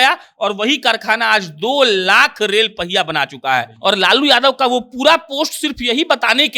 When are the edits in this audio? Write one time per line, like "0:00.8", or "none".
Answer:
0:03.7